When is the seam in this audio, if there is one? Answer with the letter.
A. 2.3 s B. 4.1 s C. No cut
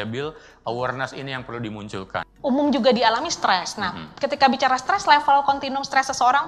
A